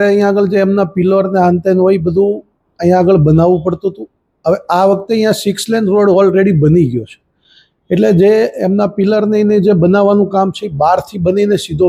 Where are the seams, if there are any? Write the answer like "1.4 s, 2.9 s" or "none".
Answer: none